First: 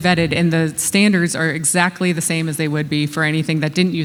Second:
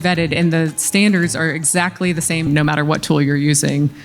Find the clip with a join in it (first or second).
second